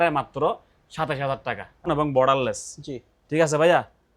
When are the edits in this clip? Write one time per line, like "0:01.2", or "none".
0:01.9